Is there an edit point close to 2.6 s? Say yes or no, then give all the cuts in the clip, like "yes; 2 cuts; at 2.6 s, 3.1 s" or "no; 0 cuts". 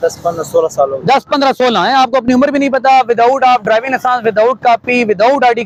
no; 0 cuts